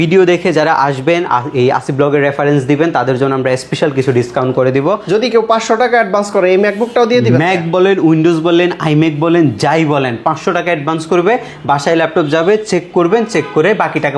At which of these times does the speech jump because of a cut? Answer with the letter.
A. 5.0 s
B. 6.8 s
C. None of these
A